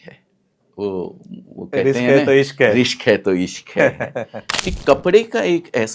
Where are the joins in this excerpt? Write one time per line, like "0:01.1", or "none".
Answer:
0:04.4